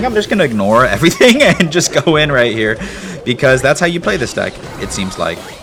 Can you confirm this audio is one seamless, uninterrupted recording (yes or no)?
yes